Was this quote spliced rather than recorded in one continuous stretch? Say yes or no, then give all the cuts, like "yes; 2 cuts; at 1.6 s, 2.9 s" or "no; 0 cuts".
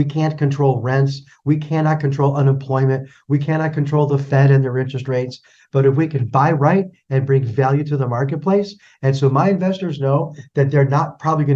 no; 0 cuts